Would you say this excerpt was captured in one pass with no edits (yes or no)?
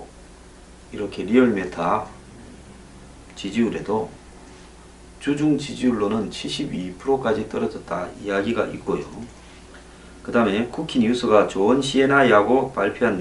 yes